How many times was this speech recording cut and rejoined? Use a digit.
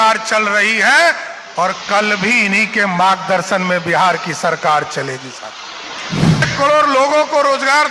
1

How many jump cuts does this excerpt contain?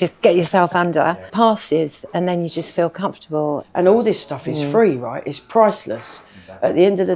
2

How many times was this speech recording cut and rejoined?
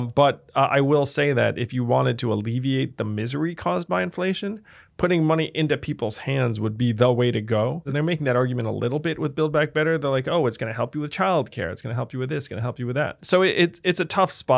2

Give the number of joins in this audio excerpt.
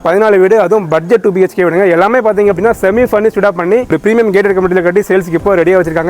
1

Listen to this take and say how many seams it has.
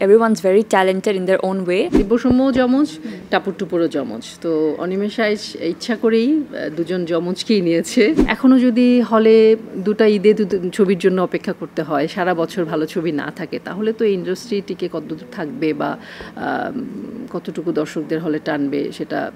2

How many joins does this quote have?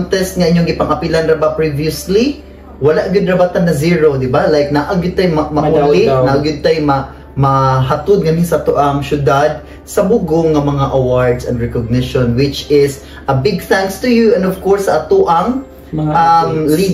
0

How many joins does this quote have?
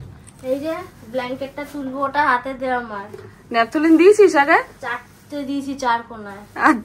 0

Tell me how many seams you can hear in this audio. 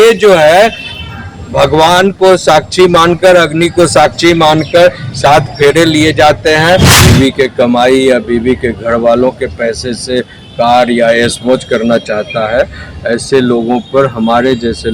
1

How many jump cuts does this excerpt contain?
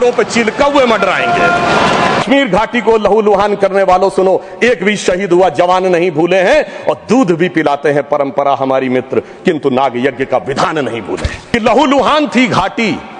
2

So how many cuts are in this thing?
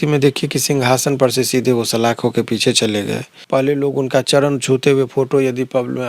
1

